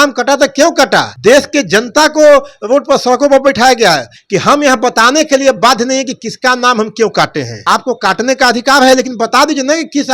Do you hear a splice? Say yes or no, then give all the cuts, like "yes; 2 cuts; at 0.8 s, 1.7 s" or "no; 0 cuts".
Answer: yes; 3 cuts; at 1.1 s, 4.1 s, 7.5 s